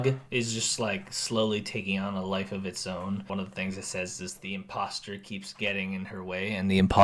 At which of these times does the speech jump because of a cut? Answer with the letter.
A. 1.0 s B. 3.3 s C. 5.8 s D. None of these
B